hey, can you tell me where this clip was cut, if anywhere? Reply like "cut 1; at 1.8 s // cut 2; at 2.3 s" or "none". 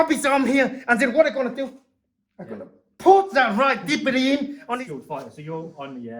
cut 1; at 4.7 s